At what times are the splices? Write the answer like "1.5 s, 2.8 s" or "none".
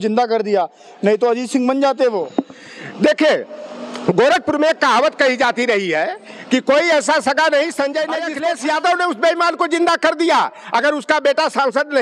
8.3 s